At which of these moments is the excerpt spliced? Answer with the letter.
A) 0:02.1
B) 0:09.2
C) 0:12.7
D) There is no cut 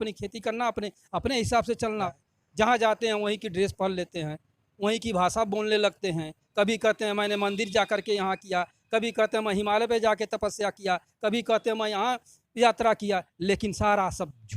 A